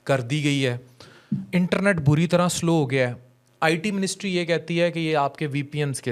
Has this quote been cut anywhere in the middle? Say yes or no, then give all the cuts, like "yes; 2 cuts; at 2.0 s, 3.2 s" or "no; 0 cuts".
no; 0 cuts